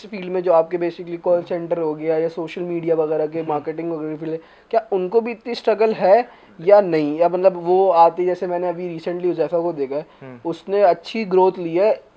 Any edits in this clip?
no; 0 cuts

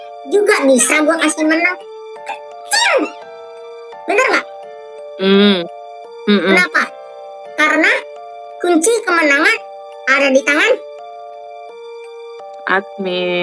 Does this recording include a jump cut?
yes; 2 cuts; at 10.9 s, 12.6 s

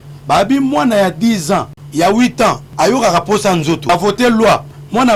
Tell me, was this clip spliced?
yes; 3 cuts; at 1.8 s, 2.7 s, 3.9 s

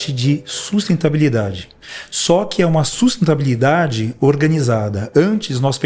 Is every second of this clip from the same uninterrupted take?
yes; 0 cuts

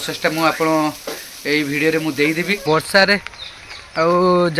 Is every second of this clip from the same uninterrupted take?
no; 1 cut; at 2.6 s

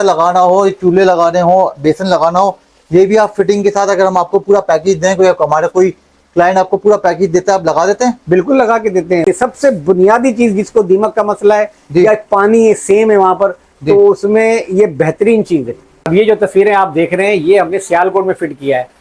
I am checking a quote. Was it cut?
yes; 2 cuts; at 9.2 s, 16.2 s

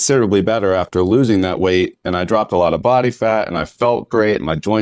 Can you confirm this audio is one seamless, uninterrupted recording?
yes; 0 cuts

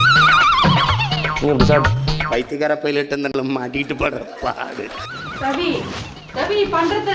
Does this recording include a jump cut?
no; 0 cuts

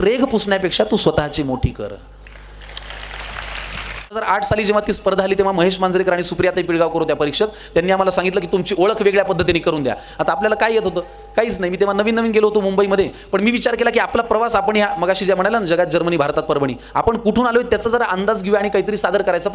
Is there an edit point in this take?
yes; 1 cut; at 4.2 s

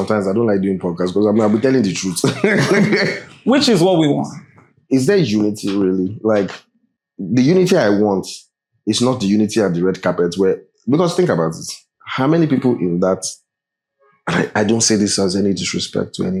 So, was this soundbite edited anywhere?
no; 0 cuts

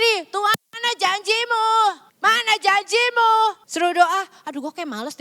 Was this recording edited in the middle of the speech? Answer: yes; 2 cuts; at 2.1 s, 3.6 s

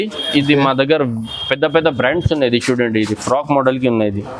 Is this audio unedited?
yes; 0 cuts

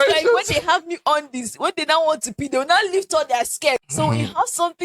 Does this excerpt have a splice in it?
yes; 1 cut; at 3.8 s

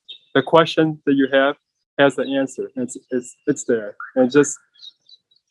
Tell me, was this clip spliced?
no; 0 cuts

